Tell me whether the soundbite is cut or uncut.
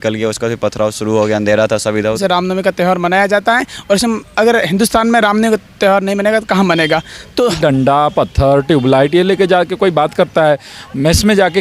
cut